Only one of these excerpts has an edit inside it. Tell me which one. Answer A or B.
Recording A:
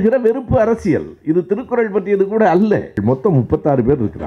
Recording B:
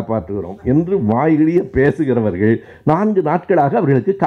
A